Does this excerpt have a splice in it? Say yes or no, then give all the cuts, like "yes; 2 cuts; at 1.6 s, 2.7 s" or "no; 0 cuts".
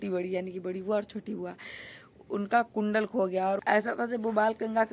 yes; 1 cut; at 3.6 s